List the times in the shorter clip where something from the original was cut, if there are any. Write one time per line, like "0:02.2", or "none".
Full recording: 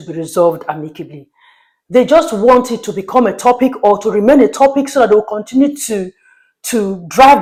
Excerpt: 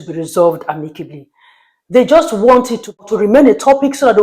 0:03.1